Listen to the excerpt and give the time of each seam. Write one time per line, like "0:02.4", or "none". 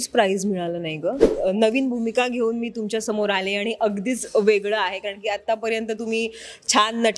0:01.3